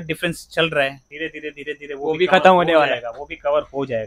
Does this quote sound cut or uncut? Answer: uncut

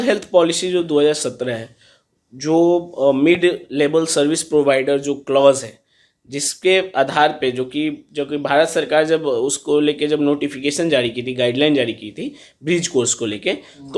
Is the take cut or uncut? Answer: uncut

